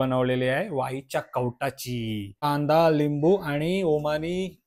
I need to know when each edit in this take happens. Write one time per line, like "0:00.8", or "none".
0:02.4